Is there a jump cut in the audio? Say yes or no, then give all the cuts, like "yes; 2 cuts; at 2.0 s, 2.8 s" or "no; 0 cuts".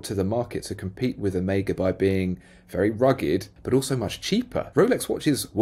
yes; 2 cuts; at 3.5 s, 4.7 s